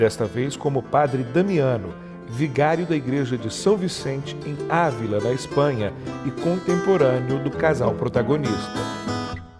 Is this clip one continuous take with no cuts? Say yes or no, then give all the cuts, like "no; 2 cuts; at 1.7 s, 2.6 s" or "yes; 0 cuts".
yes; 0 cuts